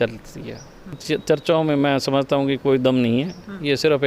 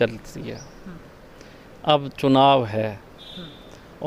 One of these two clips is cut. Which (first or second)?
first